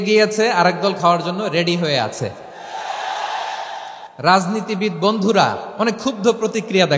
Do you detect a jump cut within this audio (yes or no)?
yes